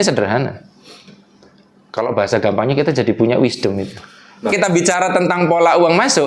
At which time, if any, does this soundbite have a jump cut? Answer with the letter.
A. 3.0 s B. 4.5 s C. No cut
B